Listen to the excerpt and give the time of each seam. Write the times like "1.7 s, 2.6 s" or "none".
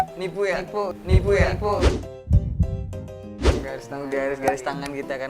3.4 s